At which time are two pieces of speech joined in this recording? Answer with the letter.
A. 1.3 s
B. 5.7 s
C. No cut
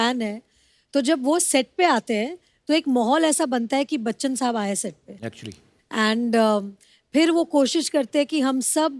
C